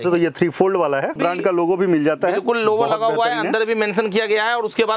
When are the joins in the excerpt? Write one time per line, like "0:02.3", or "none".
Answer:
0:01.2